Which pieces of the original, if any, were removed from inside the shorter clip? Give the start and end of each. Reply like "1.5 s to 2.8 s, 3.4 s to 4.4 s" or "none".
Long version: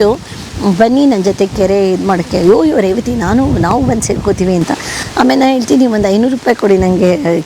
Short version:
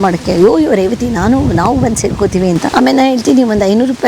4.7 s to 5.1 s